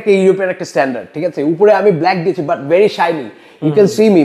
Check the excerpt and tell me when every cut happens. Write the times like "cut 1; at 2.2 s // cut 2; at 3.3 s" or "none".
none